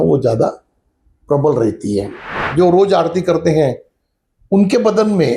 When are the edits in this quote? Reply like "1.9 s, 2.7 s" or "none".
2.4 s